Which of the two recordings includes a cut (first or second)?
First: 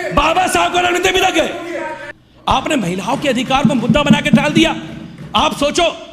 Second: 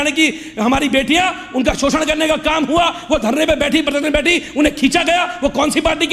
first